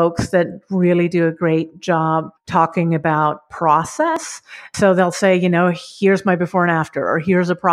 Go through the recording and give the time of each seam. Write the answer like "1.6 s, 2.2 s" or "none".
2.4 s, 4.7 s